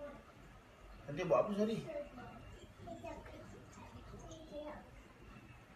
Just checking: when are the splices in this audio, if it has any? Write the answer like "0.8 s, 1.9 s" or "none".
2.5 s